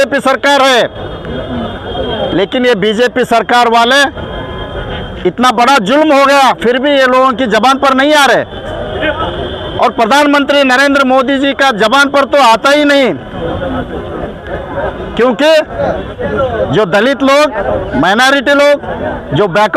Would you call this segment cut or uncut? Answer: uncut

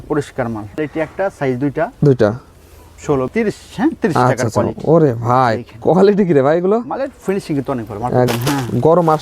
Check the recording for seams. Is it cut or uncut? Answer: cut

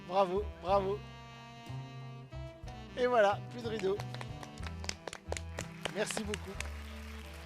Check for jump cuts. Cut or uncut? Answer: uncut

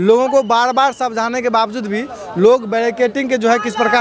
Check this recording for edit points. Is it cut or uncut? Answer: uncut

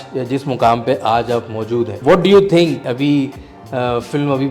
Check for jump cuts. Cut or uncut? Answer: cut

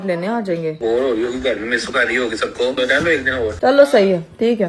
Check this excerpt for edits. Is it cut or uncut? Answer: cut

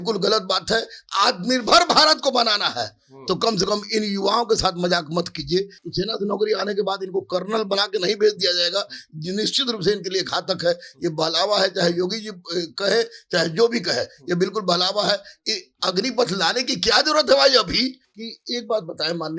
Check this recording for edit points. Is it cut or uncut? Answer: cut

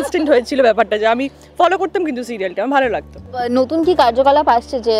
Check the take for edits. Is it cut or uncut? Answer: uncut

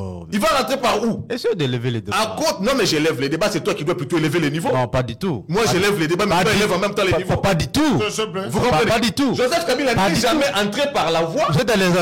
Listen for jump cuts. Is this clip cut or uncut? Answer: uncut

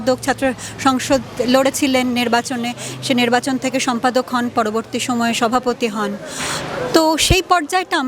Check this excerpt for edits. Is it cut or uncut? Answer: uncut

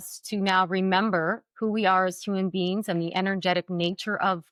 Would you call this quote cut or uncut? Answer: uncut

